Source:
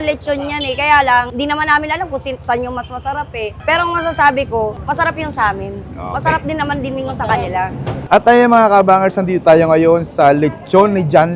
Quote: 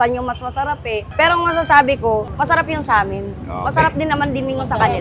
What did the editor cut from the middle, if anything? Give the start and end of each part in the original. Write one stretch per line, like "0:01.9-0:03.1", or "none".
none